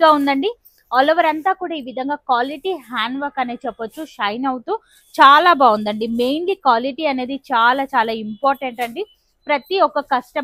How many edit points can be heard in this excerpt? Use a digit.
0